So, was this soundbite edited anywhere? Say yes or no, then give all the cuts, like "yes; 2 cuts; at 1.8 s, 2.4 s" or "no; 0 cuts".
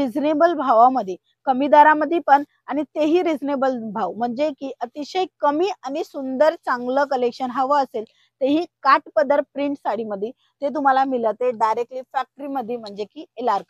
no; 0 cuts